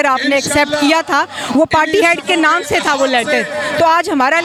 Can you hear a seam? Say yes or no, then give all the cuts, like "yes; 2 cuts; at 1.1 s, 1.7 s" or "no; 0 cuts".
no; 0 cuts